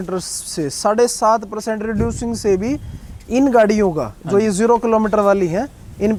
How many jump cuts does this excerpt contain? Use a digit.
0